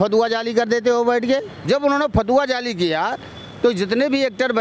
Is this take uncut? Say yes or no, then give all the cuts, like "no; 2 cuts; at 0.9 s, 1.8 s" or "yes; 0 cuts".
no; 1 cut; at 1.5 s